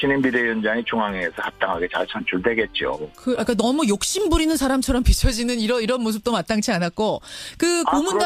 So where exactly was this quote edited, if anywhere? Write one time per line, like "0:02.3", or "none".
0:05.3